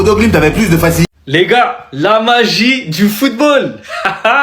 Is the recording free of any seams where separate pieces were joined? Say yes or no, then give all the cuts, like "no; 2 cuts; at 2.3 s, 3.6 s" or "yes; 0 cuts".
no; 1 cut; at 1.1 s